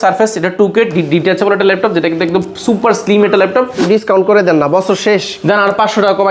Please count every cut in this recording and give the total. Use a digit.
1